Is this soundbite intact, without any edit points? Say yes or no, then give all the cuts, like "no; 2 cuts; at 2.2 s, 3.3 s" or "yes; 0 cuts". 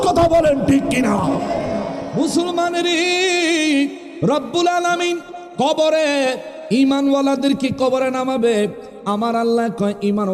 no; 1 cut; at 2.1 s